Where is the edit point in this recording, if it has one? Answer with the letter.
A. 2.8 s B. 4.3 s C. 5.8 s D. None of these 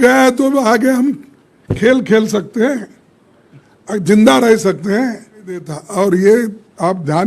C